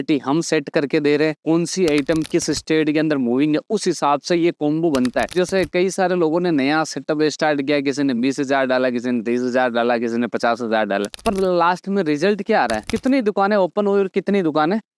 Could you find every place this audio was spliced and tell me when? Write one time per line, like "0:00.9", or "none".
none